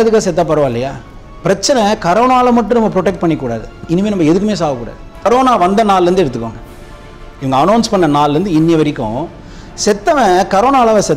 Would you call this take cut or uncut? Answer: cut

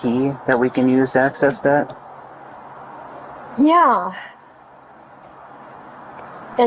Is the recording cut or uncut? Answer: uncut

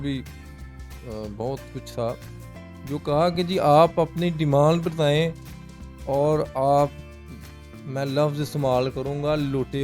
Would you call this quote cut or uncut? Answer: uncut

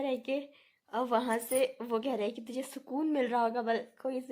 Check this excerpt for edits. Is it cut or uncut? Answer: uncut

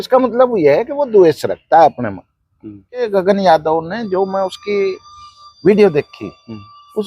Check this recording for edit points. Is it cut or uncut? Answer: cut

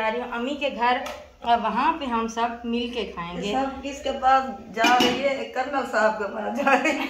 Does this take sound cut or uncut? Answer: uncut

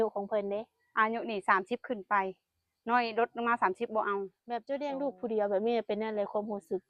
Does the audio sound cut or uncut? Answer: cut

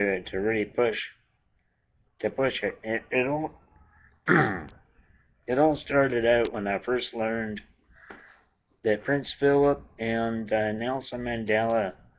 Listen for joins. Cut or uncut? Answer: cut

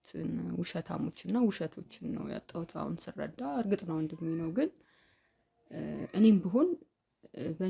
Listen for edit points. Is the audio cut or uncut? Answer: uncut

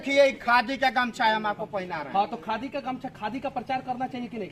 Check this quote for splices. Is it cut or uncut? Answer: uncut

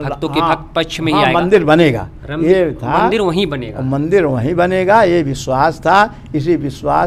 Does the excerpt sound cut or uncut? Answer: uncut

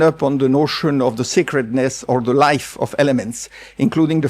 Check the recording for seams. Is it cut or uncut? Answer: uncut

